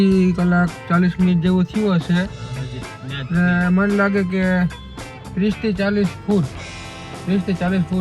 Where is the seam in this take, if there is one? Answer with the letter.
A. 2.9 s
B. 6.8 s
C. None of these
C